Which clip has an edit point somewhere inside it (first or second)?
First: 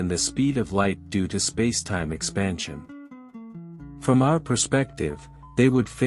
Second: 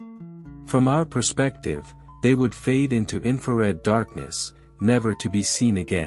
first